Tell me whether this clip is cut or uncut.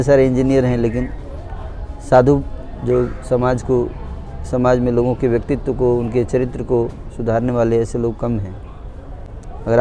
uncut